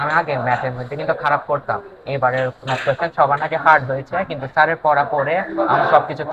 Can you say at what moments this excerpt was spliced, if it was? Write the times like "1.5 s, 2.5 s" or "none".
none